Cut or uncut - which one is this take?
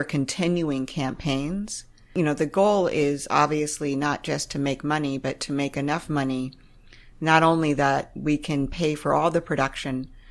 cut